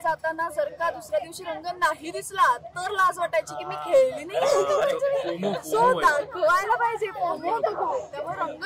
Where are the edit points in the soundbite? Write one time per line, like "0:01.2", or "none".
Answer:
none